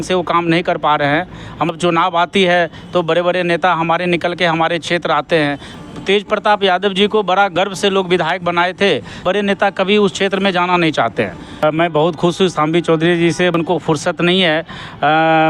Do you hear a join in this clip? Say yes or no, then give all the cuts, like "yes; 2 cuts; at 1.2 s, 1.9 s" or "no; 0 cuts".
yes; 5 cuts; at 1.7 s, 5.7 s, 9.2 s, 11.6 s, 13.5 s